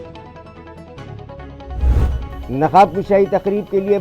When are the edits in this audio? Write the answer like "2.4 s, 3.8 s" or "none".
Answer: 2.3 s